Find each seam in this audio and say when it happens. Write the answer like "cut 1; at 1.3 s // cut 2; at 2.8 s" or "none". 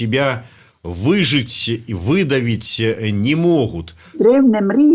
cut 1; at 4.0 s